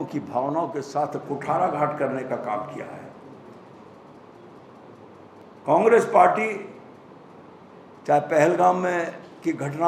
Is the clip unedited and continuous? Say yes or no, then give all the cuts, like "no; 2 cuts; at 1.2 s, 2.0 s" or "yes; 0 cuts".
yes; 0 cuts